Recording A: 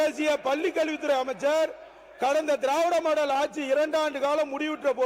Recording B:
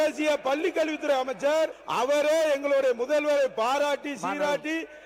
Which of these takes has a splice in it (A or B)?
B